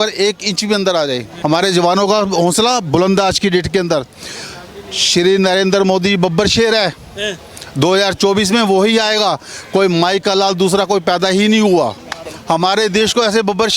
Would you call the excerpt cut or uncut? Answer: cut